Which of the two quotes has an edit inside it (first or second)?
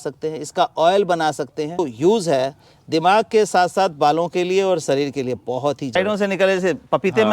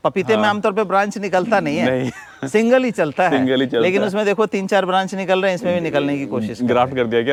first